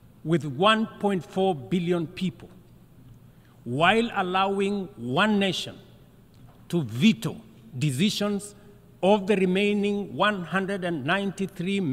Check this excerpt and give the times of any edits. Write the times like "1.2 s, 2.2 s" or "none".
none